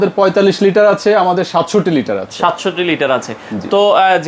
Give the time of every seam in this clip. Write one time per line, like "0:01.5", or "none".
none

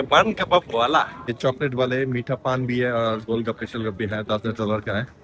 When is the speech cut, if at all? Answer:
0:01.3

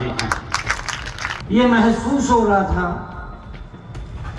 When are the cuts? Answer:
0:01.3

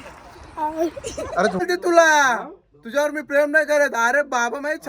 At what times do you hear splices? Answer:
0:01.6

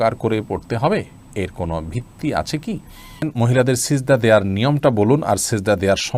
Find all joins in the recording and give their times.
0:03.3

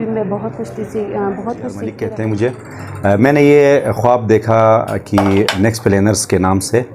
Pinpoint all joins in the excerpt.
0:02.0

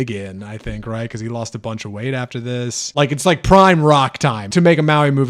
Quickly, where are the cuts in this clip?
0:02.9
0:04.4

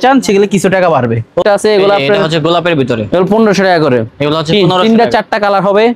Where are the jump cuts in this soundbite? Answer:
0:01.4

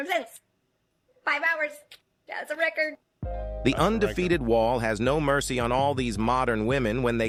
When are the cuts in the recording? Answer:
none

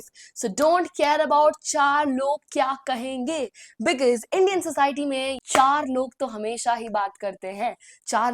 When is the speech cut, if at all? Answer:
0:05.3

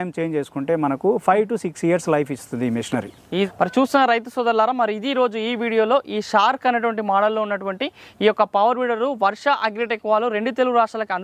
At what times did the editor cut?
none

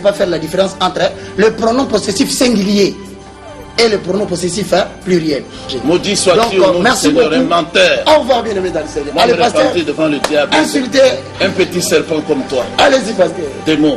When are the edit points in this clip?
0:05.7

